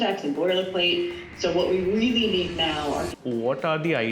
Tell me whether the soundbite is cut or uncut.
cut